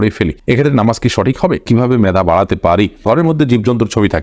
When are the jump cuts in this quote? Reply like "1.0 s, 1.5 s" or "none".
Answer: 1.6 s, 3.0 s